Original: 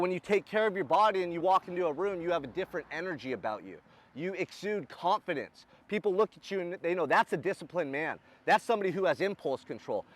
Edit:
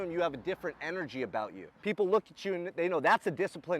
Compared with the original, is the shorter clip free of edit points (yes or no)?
no